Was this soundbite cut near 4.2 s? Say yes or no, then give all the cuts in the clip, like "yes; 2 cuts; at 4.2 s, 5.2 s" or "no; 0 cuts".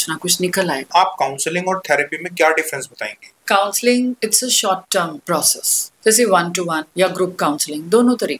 yes; 5 cuts; at 0.9 s, 3.4 s, 4.2 s, 5.3 s, 6.8 s